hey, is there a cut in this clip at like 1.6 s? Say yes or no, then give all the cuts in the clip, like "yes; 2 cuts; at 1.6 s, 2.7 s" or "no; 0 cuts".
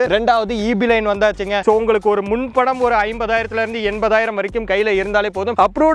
yes; 1 cut; at 1.6 s